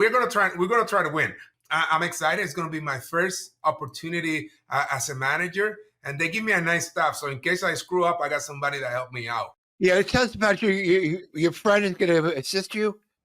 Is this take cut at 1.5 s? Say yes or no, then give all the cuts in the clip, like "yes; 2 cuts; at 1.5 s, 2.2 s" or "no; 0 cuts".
yes; 1 cut; at 1.5 s